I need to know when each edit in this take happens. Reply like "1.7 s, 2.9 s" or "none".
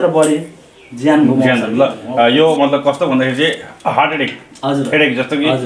none